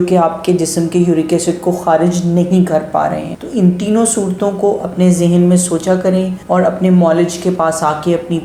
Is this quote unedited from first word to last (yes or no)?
yes